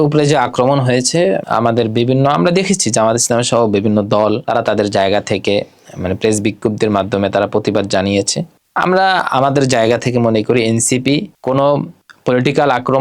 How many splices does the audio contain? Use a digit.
1